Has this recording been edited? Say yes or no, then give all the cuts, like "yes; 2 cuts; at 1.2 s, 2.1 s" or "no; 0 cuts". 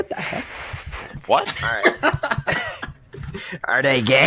no; 0 cuts